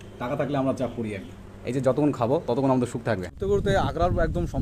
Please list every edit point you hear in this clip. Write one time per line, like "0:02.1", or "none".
0:03.3